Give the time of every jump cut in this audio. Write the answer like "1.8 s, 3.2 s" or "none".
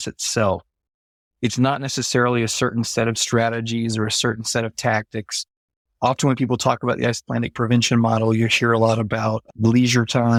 none